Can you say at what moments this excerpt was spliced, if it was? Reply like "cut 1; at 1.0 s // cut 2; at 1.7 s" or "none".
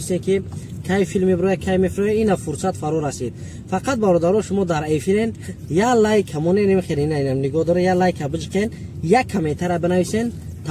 none